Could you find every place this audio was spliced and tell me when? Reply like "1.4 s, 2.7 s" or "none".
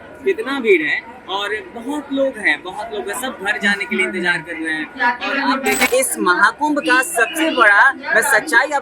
5.9 s